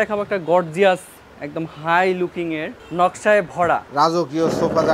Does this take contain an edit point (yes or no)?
yes